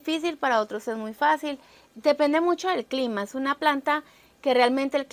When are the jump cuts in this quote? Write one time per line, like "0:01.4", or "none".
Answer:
none